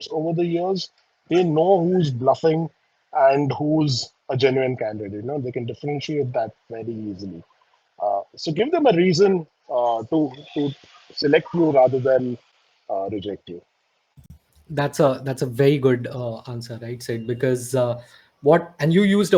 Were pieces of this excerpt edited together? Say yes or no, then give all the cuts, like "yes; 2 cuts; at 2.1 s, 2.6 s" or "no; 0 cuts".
no; 0 cuts